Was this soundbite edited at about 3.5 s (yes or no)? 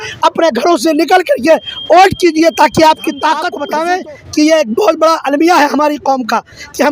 yes